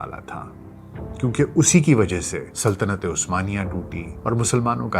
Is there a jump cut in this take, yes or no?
yes